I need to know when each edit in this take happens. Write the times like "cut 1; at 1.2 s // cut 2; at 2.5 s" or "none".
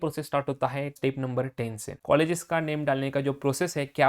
cut 1; at 0.9 s // cut 2; at 1.9 s